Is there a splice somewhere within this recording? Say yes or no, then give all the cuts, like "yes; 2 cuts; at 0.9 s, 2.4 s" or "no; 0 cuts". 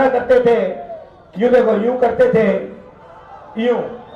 no; 0 cuts